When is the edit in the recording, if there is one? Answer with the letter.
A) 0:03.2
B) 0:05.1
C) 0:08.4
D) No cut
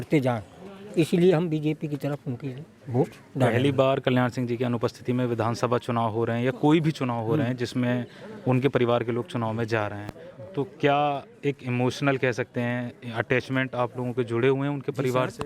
D